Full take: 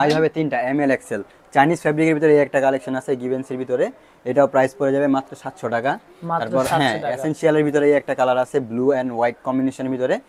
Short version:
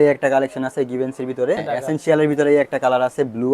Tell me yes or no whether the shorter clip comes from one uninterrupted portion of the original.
no